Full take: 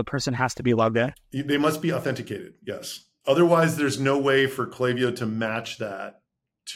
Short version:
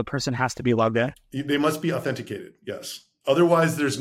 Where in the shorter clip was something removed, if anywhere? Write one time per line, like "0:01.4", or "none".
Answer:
none